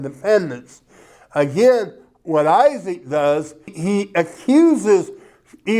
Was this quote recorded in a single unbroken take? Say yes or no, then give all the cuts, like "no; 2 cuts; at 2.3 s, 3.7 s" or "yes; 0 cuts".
no; 1 cut; at 3.8 s